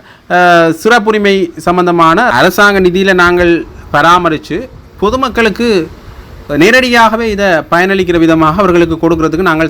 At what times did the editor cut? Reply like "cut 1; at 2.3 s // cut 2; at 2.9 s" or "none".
cut 1; at 2.3 s